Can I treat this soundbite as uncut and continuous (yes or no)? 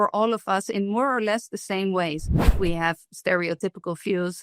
no